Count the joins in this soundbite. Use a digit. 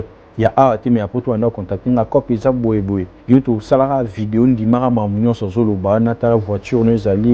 1